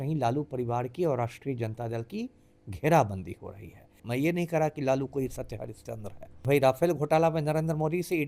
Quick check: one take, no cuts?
no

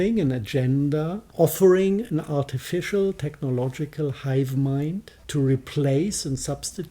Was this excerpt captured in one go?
no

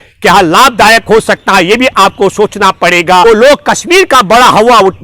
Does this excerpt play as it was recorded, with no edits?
no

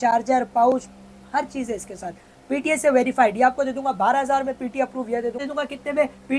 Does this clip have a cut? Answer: yes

